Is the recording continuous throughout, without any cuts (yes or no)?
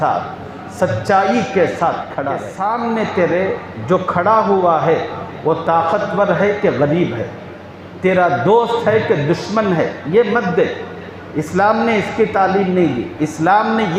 no